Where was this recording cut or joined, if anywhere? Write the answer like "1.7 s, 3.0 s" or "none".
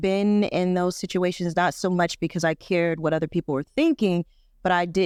none